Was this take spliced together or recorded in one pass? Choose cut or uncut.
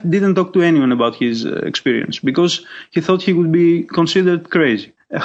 uncut